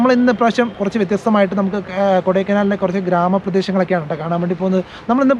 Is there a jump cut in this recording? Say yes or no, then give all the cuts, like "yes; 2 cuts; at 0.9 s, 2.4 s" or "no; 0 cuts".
no; 0 cuts